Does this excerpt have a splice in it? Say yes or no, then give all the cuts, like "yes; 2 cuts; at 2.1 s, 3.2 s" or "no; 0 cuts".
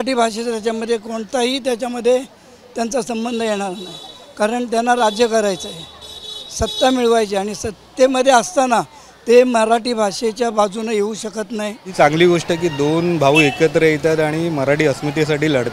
yes; 1 cut; at 11.9 s